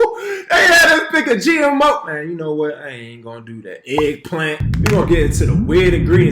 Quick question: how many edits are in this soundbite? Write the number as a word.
one